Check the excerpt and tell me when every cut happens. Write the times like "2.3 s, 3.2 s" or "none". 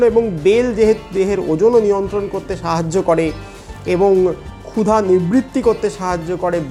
none